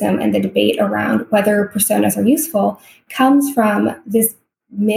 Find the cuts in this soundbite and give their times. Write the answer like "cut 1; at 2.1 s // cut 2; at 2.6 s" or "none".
none